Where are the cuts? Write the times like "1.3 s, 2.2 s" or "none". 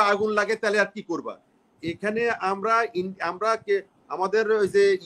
none